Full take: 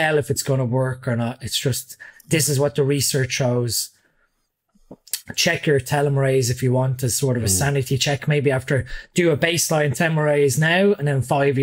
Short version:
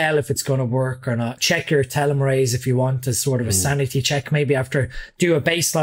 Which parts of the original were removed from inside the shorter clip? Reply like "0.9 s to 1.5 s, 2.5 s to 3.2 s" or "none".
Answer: 1.4 s to 5.3 s